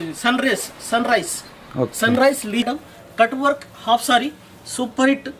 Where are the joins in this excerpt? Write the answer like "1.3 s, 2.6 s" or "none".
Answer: 2.7 s